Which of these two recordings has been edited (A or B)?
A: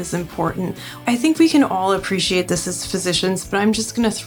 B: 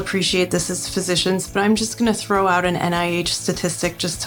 A